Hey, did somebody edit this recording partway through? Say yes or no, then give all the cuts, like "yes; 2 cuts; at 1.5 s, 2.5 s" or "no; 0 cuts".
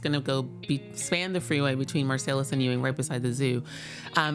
no; 0 cuts